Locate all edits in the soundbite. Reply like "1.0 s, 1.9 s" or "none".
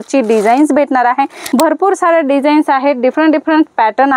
1.4 s